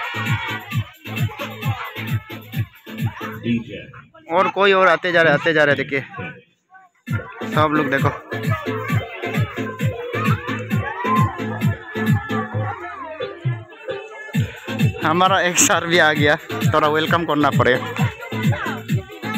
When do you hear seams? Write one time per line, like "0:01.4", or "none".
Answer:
none

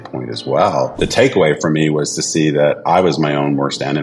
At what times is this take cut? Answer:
0:00.9

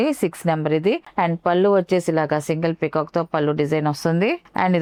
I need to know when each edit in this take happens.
none

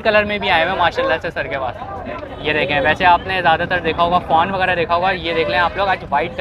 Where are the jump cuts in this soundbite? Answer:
none

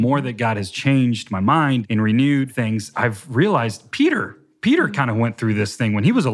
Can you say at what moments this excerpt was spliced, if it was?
0:01.8
0:02.9
0:03.8

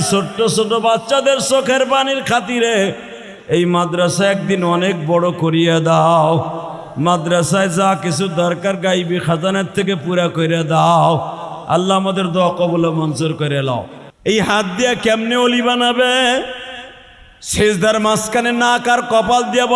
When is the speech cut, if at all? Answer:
0:14.0

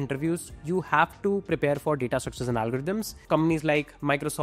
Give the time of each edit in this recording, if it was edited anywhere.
0:03.2

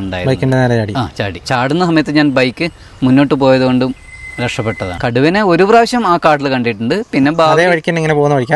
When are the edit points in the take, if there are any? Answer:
0:01.4
0:04.9

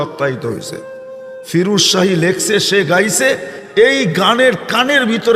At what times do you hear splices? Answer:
0:03.1

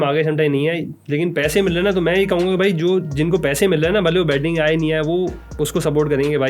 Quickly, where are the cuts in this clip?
none

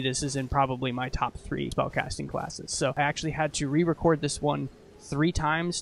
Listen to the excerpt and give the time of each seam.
0:01.7
0:03.0

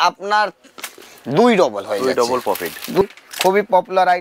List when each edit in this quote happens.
0:03.0

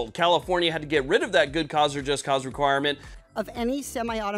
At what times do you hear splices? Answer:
0:03.1

